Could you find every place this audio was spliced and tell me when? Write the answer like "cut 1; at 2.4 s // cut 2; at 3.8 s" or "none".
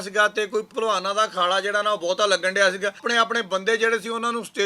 cut 1; at 3.0 s